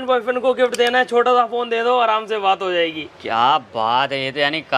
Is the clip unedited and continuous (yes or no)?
yes